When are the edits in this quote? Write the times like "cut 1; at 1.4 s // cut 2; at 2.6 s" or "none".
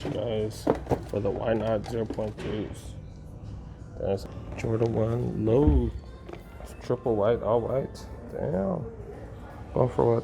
cut 1; at 4.2 s